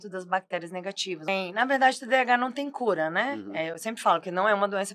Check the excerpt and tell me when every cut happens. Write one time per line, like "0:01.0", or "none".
0:01.3